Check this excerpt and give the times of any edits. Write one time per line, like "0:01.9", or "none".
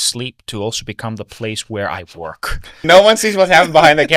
0:02.8